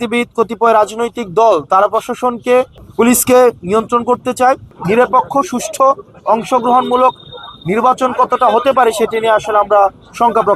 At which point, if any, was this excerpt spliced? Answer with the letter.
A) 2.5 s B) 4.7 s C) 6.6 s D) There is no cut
B